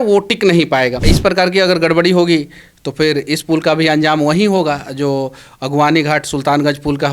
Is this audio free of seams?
no; 1 cut; at 1.1 s

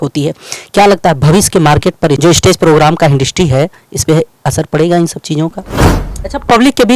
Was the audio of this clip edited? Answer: yes; 1 cut; at 5.9 s

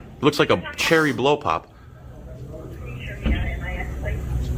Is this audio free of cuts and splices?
yes; 0 cuts

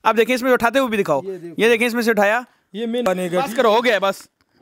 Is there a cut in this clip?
yes; 1 cut; at 3.0 s

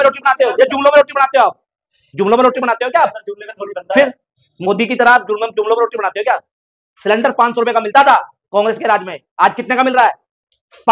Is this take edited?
no; 0 cuts

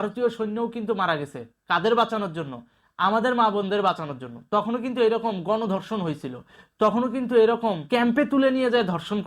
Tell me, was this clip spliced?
yes; 1 cut; at 7.8 s

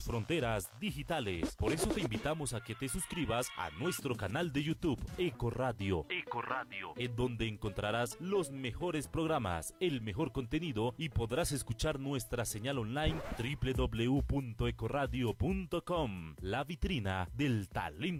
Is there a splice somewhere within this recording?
no; 0 cuts

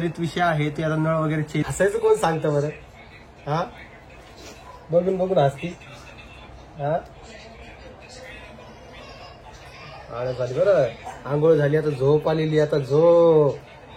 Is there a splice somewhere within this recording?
yes; 1 cut; at 1.7 s

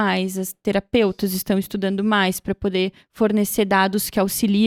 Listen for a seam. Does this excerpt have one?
no; 0 cuts

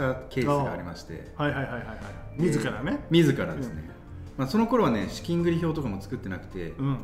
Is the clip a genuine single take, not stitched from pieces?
yes; 0 cuts

